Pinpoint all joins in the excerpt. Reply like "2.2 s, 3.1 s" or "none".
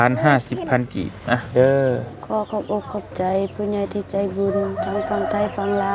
1.5 s